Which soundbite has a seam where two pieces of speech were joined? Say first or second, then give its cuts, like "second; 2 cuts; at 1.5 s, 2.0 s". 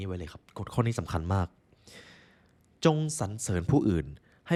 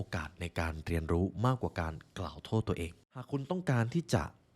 second; 1 cut; at 3.3 s